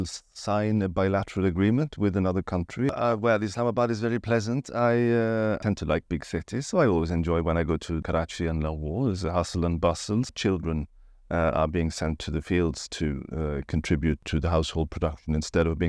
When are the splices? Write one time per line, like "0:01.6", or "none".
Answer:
0:02.9
0:05.6
0:08.1
0:10.3
0:14.2